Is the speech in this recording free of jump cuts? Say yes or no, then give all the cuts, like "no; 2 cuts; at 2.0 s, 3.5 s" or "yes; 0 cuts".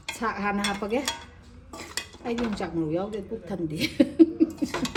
yes; 0 cuts